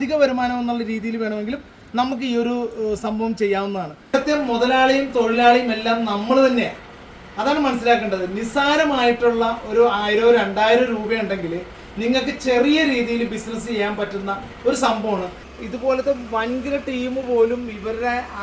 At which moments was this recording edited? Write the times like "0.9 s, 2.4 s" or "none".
4.1 s, 15.4 s